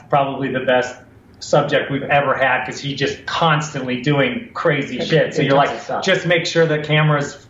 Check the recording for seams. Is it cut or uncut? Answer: uncut